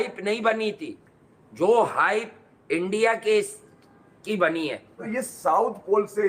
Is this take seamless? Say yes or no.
no